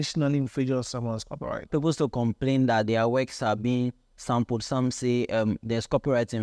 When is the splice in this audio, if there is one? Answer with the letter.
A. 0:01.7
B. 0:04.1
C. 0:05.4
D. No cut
A